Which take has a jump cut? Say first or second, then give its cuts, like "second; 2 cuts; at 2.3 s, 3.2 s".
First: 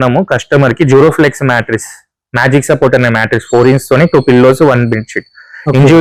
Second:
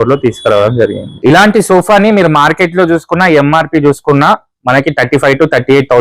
second; 1 cut; at 1.1 s